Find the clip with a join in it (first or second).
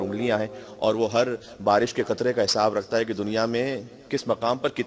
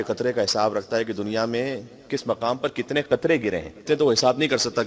second